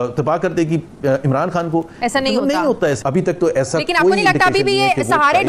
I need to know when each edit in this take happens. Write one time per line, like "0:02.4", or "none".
0:03.0